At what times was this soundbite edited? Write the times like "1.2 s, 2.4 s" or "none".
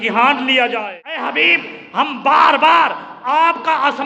1.2 s